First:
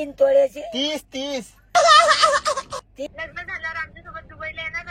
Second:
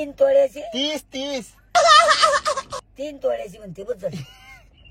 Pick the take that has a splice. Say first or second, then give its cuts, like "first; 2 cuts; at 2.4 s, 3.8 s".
first; 1 cut; at 3.1 s